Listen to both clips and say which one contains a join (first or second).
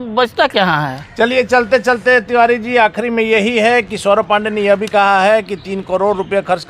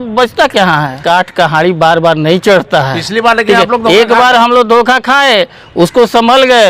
second